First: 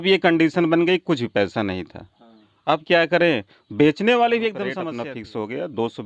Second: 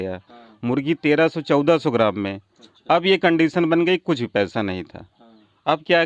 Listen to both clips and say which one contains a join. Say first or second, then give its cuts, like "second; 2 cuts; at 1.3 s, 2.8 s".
first; 1 cut; at 4.8 s